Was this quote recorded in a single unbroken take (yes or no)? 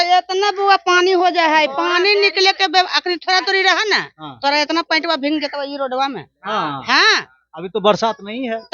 yes